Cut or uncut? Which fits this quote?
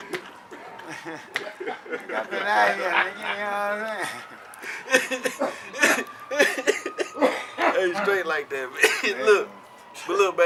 uncut